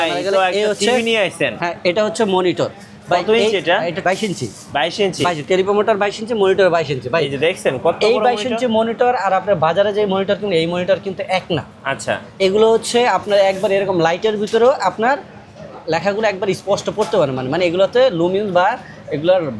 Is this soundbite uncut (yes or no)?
no